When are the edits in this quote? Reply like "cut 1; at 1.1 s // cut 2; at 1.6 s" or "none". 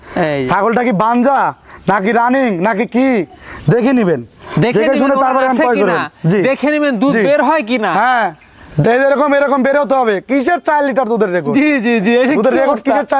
none